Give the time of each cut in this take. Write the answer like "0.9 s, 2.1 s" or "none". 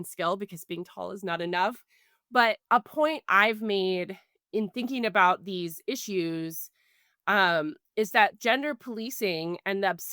2.6 s, 8.4 s